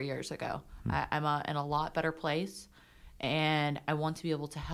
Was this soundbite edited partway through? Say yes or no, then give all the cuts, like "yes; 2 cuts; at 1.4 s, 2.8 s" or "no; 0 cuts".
no; 0 cuts